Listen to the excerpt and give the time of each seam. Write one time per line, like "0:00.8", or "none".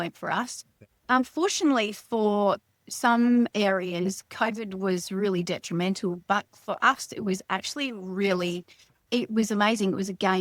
none